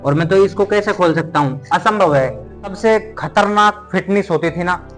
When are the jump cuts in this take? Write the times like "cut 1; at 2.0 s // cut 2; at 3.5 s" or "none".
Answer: cut 1; at 2.8 s